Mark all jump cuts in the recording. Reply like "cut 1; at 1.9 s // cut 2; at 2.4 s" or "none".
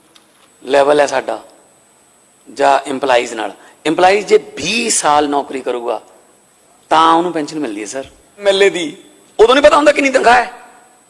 cut 1; at 8.4 s